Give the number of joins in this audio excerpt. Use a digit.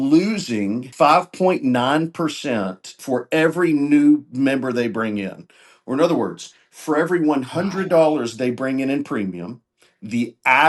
2